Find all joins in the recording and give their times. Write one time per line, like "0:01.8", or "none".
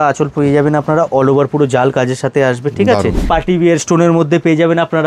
0:03.3